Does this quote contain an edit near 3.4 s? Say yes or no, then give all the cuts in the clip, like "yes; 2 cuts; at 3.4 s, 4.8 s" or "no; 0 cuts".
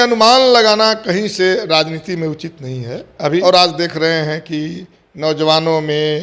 yes; 1 cut; at 3.4 s